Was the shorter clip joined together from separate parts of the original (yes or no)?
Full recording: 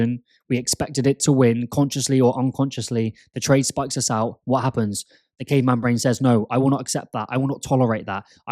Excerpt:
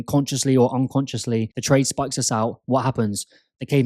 yes